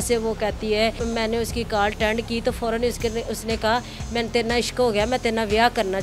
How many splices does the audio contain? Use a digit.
1